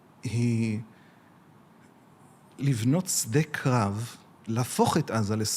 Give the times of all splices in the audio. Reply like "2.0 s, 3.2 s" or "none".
2.5 s